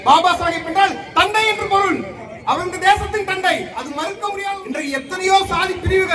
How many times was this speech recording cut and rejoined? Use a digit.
1